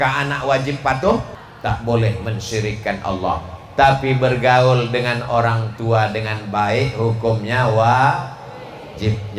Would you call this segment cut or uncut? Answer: cut